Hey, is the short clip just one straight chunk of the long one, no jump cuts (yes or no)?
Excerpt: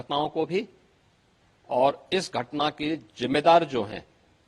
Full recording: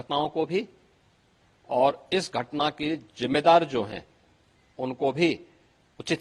yes